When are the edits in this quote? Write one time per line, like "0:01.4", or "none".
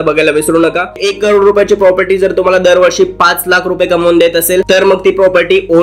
0:01.0
0:04.7